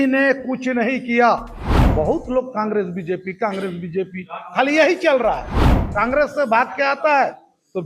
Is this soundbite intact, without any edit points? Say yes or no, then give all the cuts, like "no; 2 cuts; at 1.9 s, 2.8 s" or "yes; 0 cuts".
no; 2 cuts; at 1.8 s, 5.6 s